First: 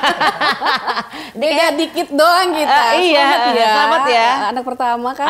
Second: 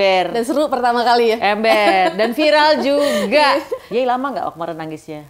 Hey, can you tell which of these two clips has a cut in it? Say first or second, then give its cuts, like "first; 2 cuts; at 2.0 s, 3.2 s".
second; 1 cut; at 3.8 s